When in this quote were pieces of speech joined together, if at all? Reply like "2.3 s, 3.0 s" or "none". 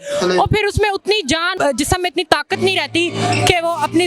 1.5 s